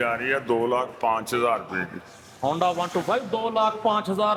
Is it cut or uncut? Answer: uncut